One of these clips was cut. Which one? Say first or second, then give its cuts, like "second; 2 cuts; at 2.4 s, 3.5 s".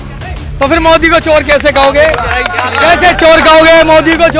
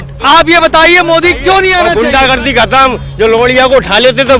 second; 1 cut; at 1.9 s